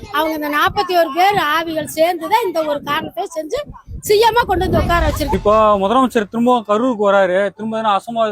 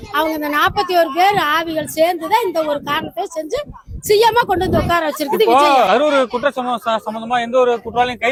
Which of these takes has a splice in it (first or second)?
first